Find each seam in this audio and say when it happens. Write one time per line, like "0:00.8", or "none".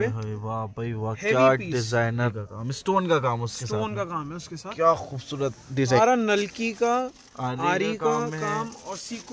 0:02.4
0:06.0